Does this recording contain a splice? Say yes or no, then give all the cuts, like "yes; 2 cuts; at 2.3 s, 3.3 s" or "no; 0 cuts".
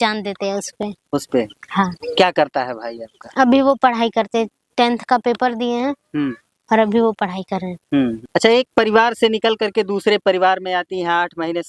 no; 0 cuts